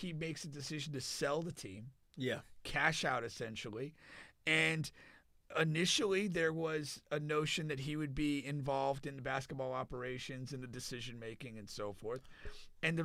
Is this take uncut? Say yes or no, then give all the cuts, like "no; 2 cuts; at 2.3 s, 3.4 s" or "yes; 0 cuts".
yes; 0 cuts